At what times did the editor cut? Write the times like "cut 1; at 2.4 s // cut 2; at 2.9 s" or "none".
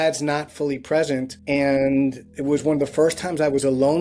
cut 1; at 1.3 s

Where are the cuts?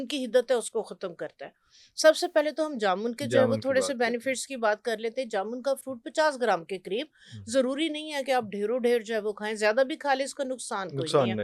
none

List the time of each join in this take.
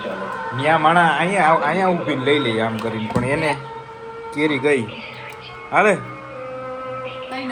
none

